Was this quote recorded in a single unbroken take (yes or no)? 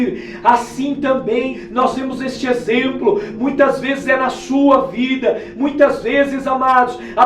yes